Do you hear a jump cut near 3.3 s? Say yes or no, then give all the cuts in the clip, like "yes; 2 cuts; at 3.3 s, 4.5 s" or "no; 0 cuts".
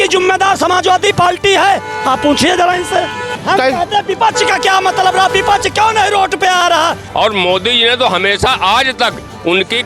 yes; 2 cuts; at 3.3 s, 7.0 s